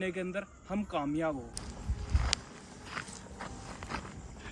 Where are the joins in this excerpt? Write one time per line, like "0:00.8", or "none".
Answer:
0:01.6